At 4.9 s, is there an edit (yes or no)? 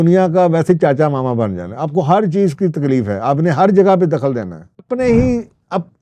yes